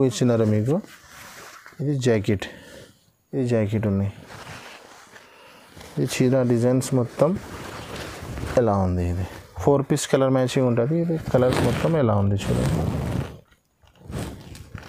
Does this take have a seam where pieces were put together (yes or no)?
no